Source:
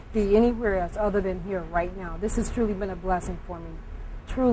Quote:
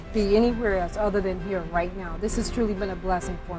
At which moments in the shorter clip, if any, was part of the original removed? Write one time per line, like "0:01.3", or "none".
none

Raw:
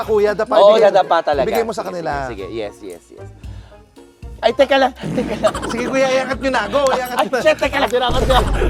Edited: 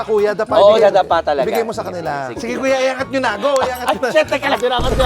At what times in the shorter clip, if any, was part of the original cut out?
0:02.4

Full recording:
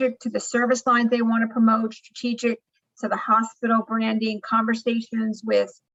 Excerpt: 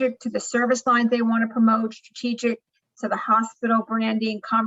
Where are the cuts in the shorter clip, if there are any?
none

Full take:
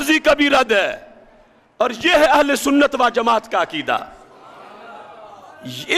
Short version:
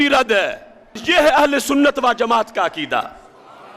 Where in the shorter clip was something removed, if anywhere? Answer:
0:01.0

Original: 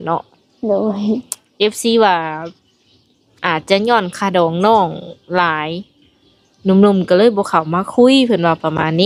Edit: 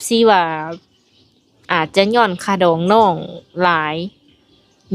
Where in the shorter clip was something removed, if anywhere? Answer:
none

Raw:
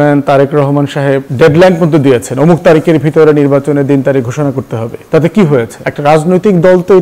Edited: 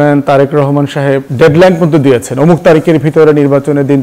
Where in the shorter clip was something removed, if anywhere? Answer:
none

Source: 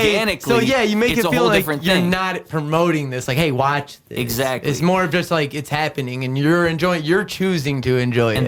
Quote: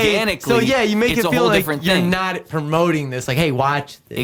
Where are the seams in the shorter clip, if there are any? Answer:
none

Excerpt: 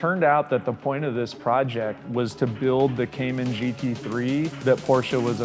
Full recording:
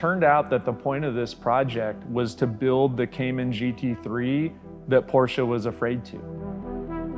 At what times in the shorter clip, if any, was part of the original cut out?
0:04.5

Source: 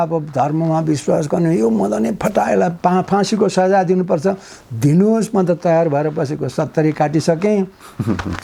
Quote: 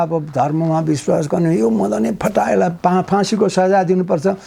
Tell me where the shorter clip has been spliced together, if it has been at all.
none

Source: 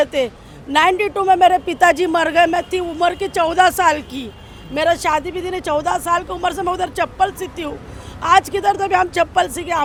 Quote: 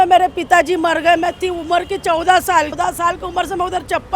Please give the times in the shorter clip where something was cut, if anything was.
0:02.8

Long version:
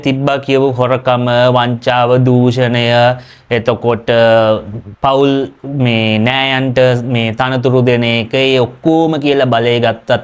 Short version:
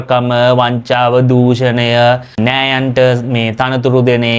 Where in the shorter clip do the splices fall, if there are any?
0:02.4

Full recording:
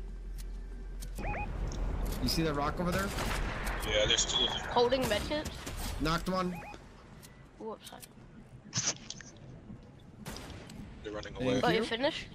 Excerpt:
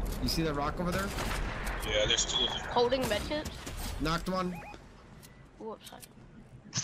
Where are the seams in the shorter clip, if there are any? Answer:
none

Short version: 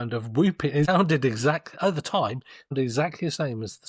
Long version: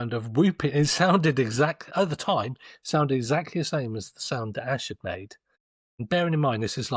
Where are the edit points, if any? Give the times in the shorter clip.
0:00.9
0:02.7

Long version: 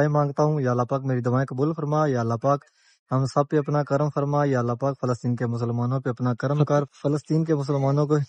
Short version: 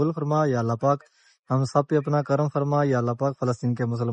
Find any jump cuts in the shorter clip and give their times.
none

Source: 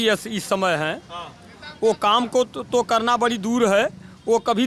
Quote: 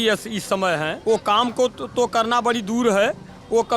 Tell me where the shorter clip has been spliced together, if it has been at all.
0:01.0

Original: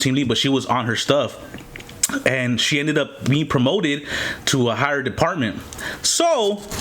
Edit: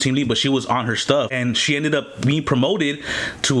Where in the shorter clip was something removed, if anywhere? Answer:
0:01.3

